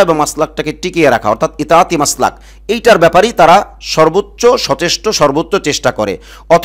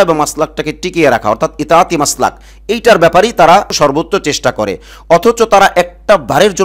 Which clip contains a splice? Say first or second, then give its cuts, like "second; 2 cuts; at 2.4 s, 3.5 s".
second; 1 cut; at 3.7 s